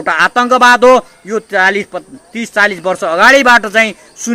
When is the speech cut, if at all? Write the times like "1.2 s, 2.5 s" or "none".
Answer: none